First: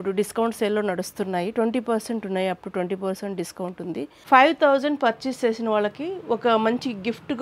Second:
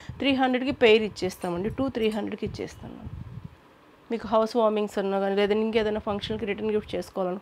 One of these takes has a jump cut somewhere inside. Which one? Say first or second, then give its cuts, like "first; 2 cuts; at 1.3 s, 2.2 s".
first; 1 cut; at 4.2 s